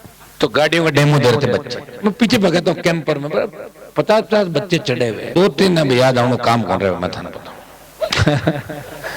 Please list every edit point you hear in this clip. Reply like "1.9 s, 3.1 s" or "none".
5.3 s